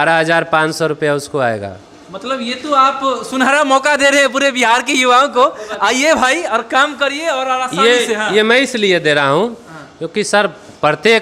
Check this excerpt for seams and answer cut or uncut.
uncut